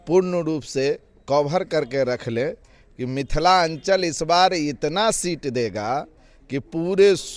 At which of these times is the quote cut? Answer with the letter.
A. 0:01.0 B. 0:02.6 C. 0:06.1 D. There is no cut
D